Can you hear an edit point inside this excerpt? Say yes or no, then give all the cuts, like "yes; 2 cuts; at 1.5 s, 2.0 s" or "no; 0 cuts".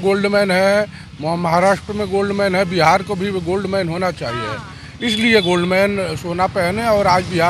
no; 0 cuts